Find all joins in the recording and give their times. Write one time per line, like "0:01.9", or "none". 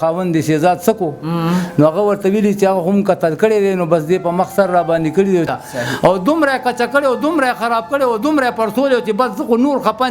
0:05.5